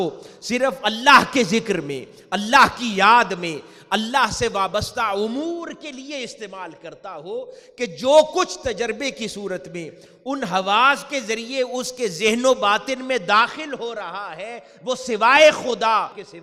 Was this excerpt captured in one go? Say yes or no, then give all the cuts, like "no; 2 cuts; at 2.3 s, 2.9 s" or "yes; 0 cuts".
yes; 0 cuts